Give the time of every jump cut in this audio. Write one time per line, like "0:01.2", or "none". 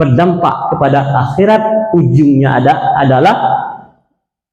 none